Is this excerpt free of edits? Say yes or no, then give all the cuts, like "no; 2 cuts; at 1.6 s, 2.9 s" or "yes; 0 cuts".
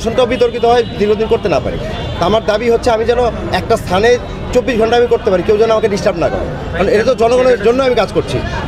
yes; 0 cuts